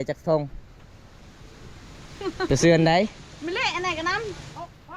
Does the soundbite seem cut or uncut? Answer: uncut